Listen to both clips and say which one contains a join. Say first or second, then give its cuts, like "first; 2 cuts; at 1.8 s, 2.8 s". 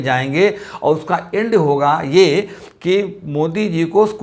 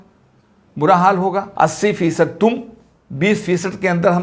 second; 1 cut; at 1.5 s